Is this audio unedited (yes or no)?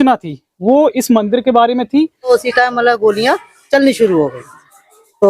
no